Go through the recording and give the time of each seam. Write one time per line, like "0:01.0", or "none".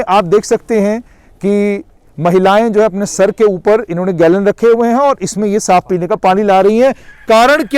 none